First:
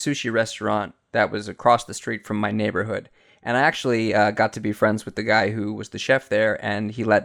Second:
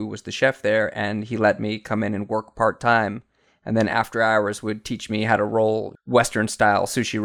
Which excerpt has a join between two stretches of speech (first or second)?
second